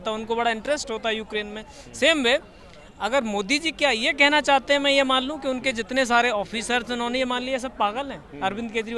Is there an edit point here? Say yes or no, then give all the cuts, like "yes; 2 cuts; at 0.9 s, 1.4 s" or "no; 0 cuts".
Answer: no; 0 cuts